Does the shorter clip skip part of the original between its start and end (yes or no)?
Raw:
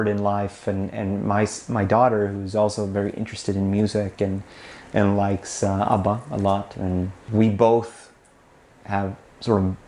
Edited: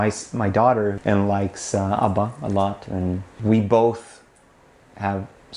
yes